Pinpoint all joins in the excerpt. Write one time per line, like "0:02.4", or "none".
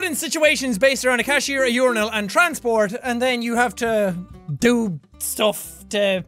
0:02.8